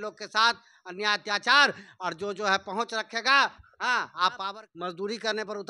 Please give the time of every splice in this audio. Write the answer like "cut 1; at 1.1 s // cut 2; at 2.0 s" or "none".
cut 1; at 4.5 s